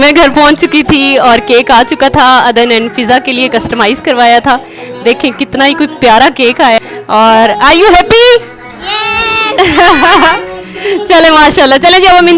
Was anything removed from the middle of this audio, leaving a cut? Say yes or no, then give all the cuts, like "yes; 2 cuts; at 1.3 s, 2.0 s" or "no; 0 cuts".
yes; 1 cut; at 6.8 s